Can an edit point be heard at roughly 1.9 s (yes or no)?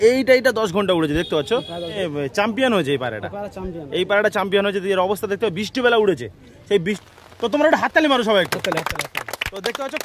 yes